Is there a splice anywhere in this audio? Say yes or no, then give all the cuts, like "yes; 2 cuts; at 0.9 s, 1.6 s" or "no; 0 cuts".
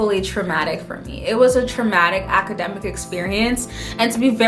no; 0 cuts